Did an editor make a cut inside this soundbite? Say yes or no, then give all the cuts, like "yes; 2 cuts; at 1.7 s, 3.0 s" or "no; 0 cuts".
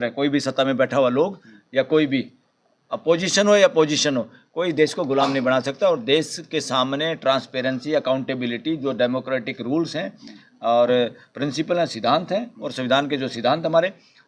no; 0 cuts